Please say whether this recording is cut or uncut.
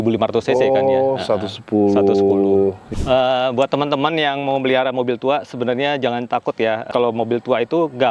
cut